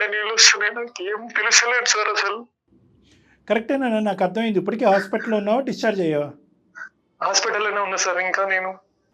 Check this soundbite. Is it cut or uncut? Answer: uncut